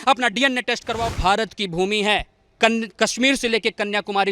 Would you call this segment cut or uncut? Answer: cut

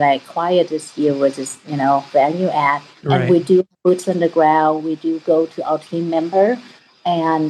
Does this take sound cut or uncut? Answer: uncut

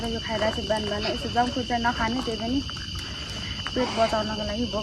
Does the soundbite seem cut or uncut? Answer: uncut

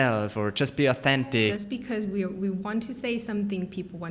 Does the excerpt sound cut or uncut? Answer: cut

